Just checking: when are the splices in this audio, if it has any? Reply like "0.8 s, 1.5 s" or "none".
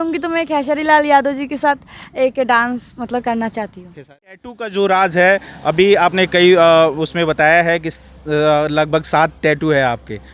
4.2 s